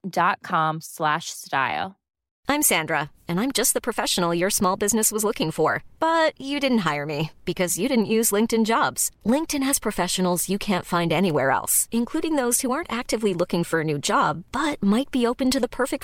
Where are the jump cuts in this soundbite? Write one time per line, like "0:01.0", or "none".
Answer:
0:02.3